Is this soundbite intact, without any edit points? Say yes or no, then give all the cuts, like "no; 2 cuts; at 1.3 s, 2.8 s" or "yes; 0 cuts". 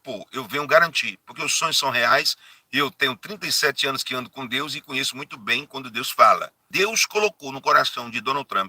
no; 1 cut; at 6.6 s